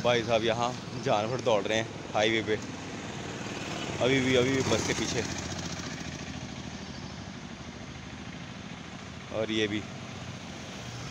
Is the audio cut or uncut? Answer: uncut